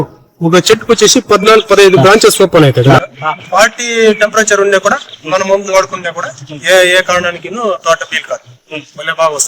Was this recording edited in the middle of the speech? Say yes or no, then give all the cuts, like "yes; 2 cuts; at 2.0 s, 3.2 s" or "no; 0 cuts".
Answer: yes; 1 cut; at 3.0 s